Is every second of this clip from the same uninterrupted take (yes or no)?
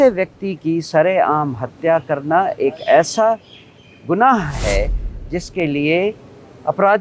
yes